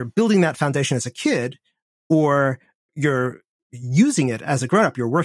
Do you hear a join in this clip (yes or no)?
yes